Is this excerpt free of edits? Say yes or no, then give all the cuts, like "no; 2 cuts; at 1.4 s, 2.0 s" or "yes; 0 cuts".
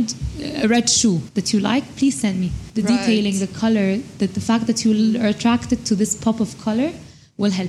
yes; 0 cuts